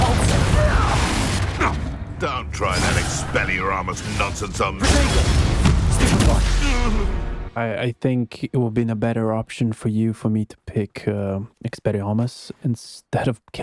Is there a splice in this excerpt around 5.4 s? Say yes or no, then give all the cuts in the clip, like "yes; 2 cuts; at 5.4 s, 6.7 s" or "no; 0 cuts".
no; 1 cut; at 12.5 s